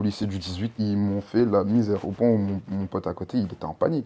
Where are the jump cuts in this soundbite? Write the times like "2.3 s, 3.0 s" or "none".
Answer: none